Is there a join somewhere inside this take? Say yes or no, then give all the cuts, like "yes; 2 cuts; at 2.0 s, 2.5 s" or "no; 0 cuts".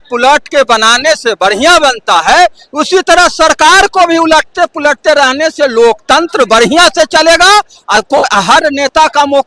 no; 0 cuts